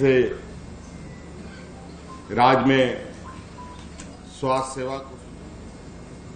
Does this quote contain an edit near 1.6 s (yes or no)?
no